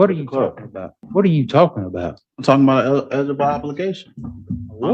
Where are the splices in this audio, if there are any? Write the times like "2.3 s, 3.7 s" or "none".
1.0 s

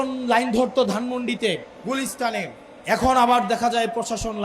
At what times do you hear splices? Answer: 1.7 s, 2.7 s

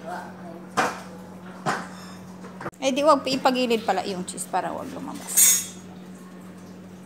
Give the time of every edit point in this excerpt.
2.8 s

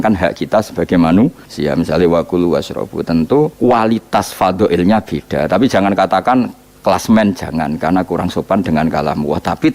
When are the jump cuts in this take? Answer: 1.5 s, 3.5 s, 6.6 s

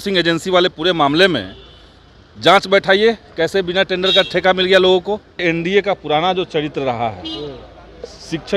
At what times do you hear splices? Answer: 5.4 s

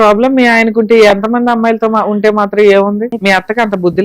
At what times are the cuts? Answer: 3.1 s

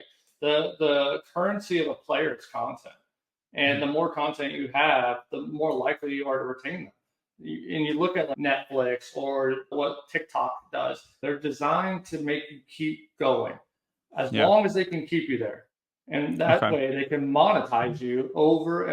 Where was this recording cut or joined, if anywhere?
8.3 s, 11.2 s

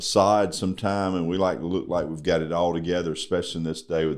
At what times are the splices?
none

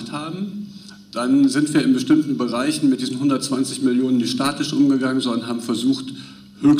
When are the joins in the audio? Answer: none

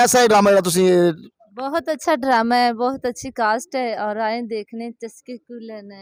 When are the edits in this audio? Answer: none

